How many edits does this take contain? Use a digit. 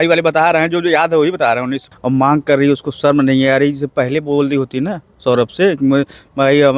1